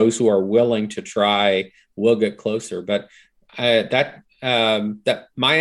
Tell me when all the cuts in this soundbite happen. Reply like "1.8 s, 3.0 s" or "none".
none